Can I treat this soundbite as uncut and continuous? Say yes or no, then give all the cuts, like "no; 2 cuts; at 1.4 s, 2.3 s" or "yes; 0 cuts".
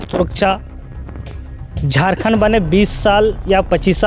yes; 0 cuts